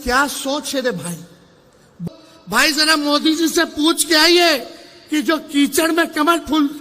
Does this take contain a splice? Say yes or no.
yes